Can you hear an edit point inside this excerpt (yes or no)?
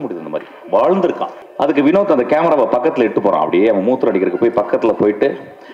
yes